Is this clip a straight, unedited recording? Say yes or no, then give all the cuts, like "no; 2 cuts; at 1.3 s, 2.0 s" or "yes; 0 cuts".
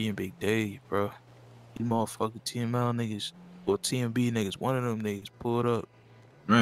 yes; 0 cuts